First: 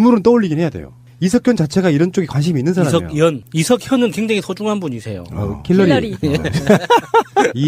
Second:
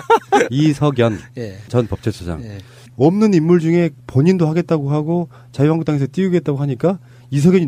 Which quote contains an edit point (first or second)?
second